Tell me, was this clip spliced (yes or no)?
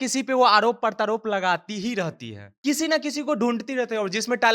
yes